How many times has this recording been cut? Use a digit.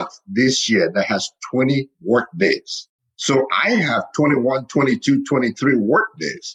0